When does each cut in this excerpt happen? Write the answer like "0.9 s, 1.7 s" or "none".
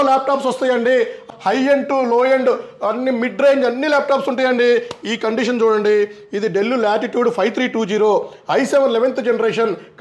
1.3 s

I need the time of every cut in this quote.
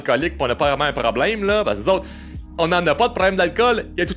none

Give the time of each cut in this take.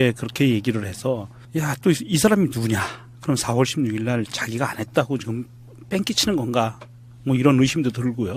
5.5 s

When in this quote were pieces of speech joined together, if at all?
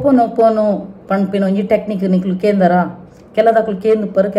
none

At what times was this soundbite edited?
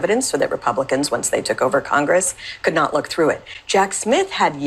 3.5 s

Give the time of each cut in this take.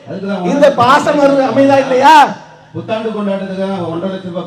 none

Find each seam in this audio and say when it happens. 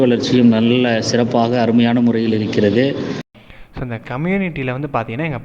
3.3 s

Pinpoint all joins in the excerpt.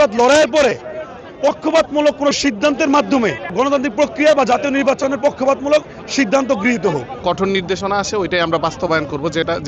3.5 s, 7.1 s

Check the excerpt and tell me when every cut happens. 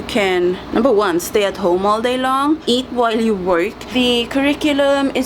2.6 s, 3.8 s

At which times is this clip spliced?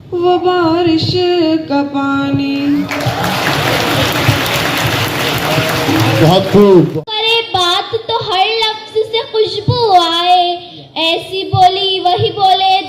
6.9 s

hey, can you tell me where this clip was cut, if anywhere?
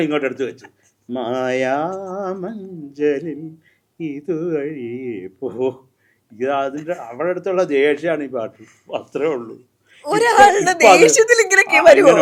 none

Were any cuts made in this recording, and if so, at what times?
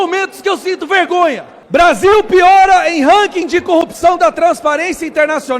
1.5 s

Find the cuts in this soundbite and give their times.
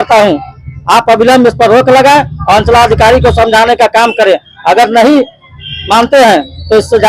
none

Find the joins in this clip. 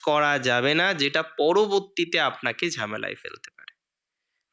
none

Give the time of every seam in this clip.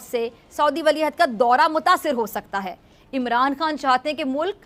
none

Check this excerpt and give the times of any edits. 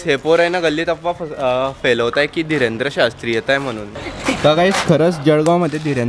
3.9 s

